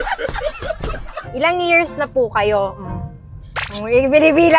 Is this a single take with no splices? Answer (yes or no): no